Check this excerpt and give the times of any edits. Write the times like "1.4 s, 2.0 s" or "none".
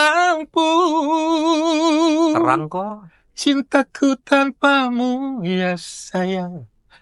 none